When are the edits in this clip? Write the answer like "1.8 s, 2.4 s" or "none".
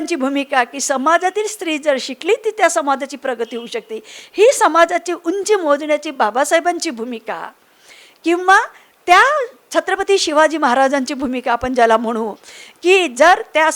none